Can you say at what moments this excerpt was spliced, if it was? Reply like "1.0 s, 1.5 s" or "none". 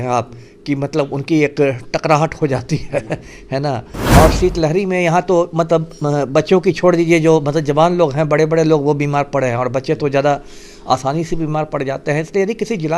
3.9 s